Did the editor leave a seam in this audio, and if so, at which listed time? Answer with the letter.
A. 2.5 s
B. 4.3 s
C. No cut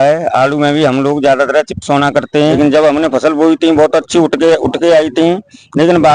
A